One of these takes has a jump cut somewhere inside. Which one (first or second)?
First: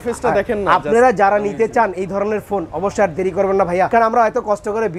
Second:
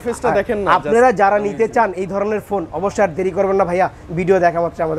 first